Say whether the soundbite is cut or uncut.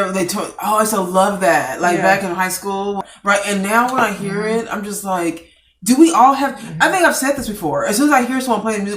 cut